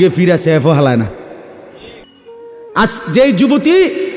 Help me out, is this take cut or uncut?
cut